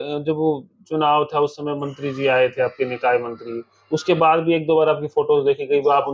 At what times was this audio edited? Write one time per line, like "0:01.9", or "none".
none